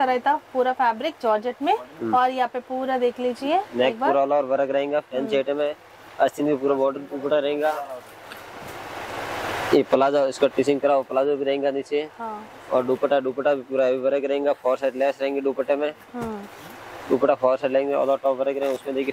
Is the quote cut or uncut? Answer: uncut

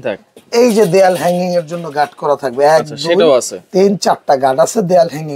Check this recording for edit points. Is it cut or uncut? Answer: uncut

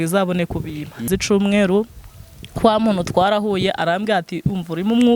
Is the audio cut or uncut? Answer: cut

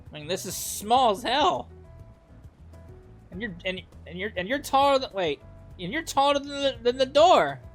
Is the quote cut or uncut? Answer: uncut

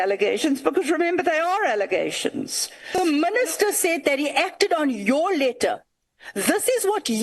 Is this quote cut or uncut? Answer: cut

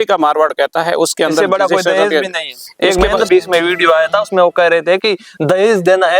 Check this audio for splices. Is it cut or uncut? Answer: cut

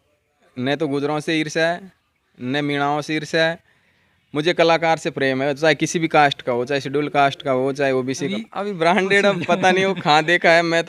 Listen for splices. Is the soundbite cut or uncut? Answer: cut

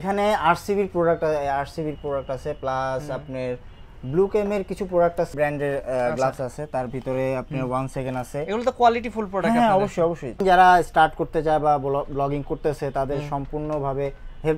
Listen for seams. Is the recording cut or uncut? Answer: cut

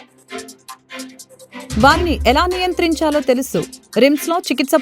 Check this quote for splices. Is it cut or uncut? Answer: cut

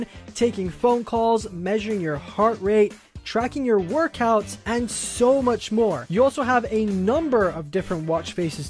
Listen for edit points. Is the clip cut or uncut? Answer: uncut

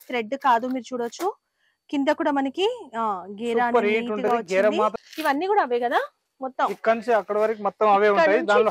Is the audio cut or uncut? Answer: cut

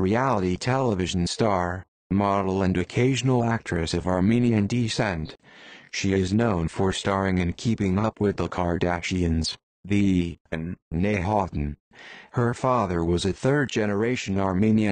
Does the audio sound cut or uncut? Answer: uncut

